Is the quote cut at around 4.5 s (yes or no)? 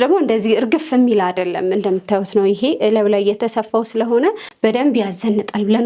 yes